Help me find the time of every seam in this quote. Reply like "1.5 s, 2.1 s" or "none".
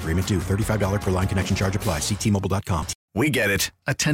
3.0 s